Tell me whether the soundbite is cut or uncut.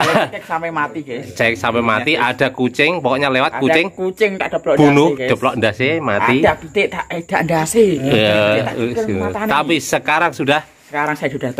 uncut